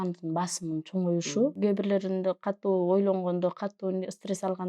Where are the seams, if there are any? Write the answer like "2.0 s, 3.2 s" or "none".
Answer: 1.6 s